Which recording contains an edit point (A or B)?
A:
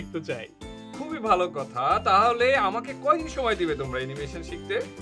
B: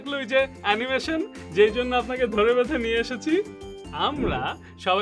B